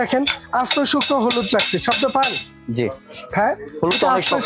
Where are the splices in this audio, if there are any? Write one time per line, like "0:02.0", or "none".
none